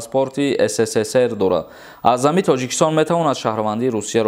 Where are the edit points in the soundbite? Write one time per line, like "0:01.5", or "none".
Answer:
none